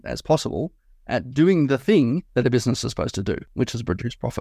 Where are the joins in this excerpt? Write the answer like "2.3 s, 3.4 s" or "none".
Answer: 2.3 s, 3.5 s